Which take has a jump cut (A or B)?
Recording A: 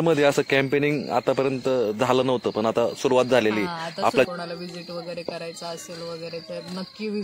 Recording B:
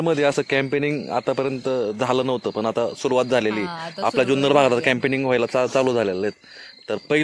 A